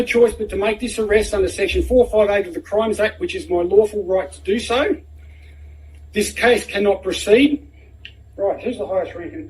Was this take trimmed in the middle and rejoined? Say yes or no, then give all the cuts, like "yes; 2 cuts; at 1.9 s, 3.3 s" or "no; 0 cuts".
no; 0 cuts